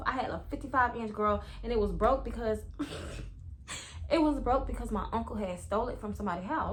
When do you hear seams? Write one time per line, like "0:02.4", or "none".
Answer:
none